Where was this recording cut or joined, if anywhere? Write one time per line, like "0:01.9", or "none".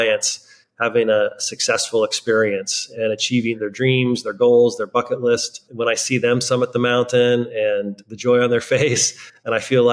0:05.6